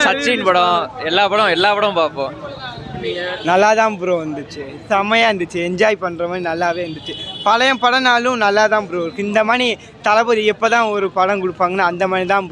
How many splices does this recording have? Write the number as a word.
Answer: zero